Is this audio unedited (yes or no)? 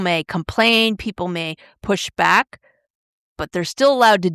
yes